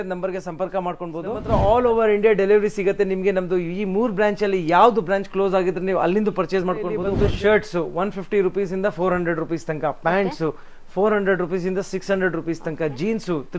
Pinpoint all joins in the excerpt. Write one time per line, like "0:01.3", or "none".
0:01.4
0:07.1